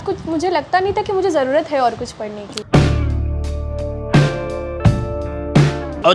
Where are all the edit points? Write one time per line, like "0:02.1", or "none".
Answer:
none